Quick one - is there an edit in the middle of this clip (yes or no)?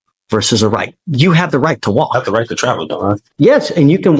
yes